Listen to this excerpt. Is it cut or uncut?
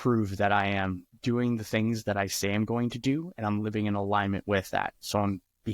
uncut